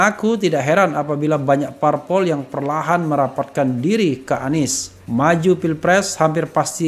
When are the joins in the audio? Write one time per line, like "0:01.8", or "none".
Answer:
none